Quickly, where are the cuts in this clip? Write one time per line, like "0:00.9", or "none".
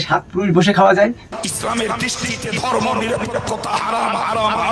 0:01.2